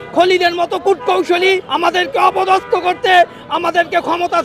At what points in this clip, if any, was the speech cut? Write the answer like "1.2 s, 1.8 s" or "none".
1.7 s